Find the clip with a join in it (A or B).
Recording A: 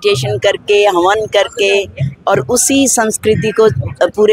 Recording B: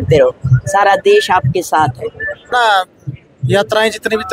B